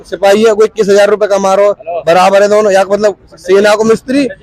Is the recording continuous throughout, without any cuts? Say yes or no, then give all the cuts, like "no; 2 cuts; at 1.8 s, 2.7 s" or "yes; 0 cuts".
yes; 0 cuts